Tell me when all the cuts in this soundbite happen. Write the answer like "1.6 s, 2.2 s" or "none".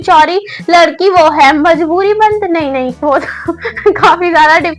none